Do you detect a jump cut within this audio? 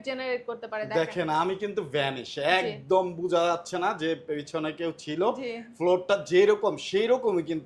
no; 0 cuts

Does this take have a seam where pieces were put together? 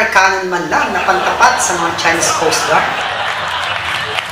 yes; 1 cut; at 2.8 s

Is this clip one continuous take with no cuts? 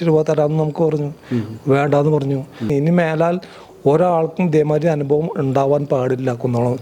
no; 1 cut; at 2.7 s

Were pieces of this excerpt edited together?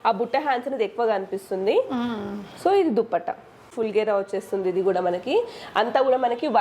yes; 1 cut; at 3.7 s

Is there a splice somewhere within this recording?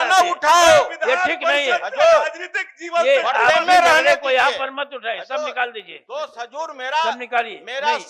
no; 0 cuts

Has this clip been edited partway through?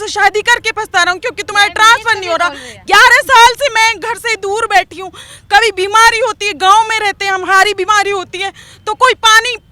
no; 0 cuts

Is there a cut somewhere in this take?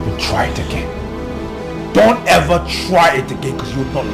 no; 0 cuts

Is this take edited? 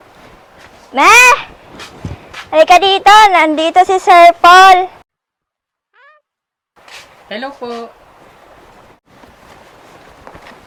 no; 0 cuts

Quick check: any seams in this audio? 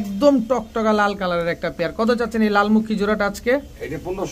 no; 0 cuts

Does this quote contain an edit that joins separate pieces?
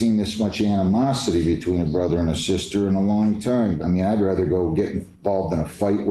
yes; 1 cut; at 3.8 s

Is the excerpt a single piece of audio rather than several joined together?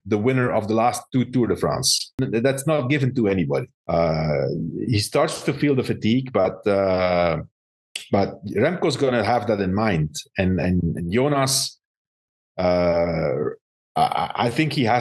no; 2 cuts; at 2.1 s, 3.8 s

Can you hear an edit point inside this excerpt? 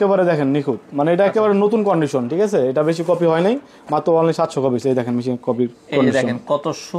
no; 0 cuts

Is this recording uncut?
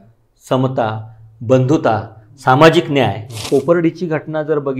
no; 1 cut; at 3.5 s

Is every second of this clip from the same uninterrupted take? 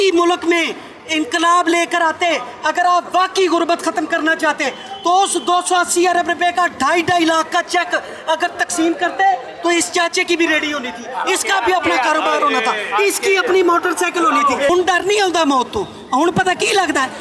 no; 1 cut; at 14.7 s

